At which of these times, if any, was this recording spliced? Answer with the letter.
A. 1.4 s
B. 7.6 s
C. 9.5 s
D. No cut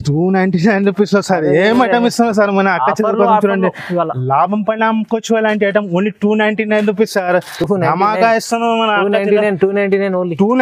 D